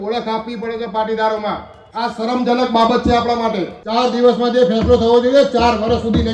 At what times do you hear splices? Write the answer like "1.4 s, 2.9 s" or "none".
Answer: 3.7 s